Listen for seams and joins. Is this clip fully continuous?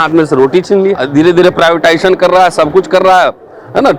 no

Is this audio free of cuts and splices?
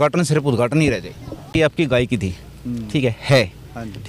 no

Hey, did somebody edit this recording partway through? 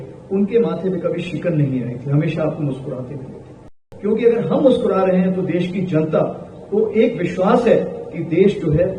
yes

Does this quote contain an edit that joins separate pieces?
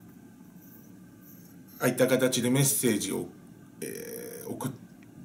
no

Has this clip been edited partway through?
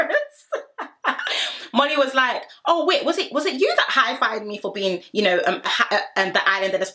no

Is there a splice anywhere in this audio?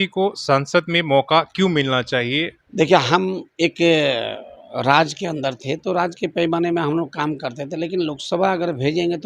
yes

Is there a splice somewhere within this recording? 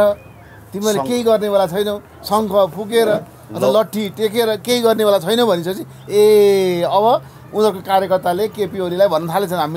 no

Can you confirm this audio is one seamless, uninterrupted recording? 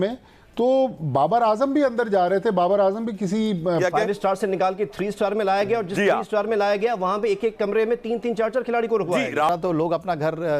no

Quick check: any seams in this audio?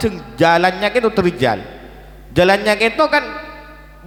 no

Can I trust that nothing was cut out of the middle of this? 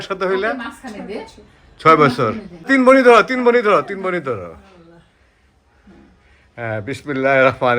no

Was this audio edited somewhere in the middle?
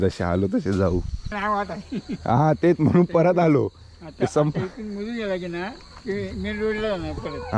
yes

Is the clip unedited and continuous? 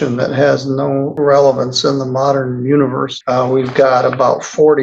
no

